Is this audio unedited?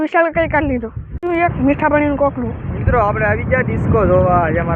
yes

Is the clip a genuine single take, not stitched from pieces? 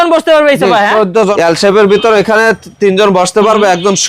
no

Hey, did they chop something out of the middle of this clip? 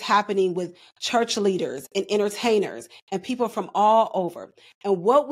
no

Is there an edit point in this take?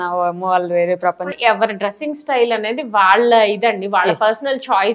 yes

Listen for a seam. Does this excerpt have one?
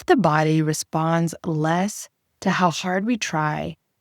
no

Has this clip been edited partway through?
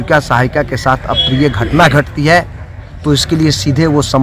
no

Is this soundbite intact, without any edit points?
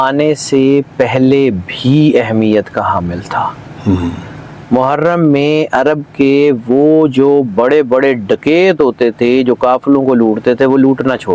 yes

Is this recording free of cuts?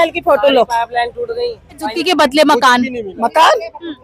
no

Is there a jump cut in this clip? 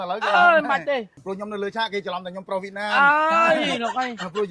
yes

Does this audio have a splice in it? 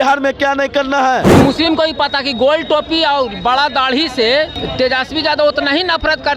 yes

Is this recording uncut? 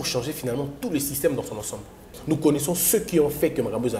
no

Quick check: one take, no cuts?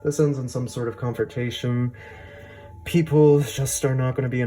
yes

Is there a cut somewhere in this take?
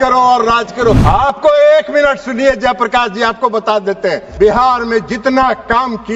yes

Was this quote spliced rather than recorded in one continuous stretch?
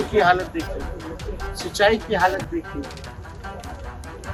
no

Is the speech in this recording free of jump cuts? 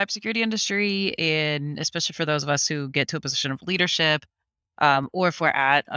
yes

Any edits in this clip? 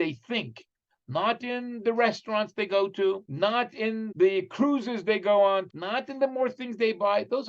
yes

